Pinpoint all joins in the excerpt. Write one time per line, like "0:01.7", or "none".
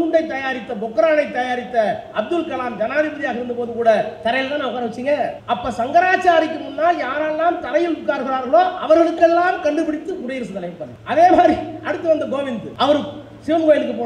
0:05.4
0:10.9
0:12.7